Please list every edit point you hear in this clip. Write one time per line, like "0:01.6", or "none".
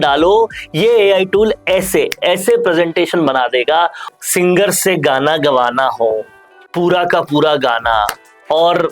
0:04.1